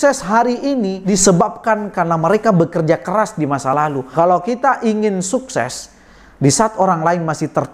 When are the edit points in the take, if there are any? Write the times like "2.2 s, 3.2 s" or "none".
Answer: 4.1 s